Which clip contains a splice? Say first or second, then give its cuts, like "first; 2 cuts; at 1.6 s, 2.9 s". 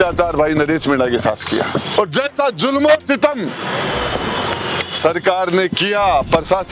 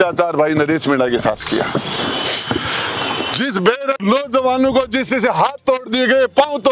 first; 1 cut; at 1.9 s